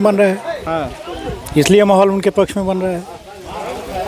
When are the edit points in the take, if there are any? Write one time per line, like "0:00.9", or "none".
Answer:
none